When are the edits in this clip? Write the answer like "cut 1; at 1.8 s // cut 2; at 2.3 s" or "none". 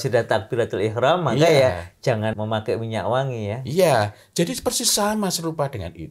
cut 1; at 2.4 s